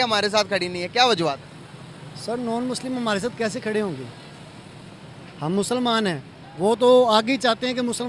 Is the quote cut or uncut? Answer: uncut